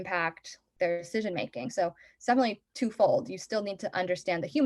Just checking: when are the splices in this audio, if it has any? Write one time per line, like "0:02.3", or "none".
0:01.1